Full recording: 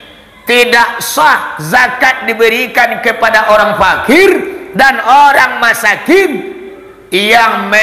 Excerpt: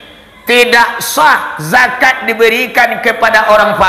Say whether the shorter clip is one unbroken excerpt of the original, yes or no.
yes